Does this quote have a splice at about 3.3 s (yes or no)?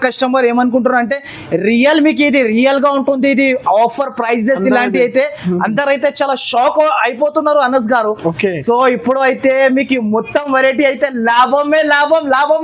no